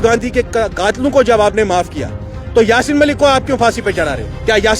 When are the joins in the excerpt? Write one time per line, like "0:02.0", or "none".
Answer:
none